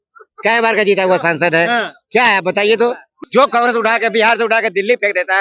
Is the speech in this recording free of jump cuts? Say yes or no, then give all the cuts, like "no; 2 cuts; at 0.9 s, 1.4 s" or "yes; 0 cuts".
no; 1 cut; at 3.1 s